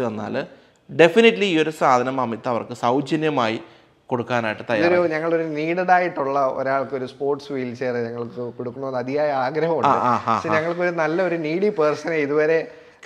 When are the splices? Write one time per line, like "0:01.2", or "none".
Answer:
none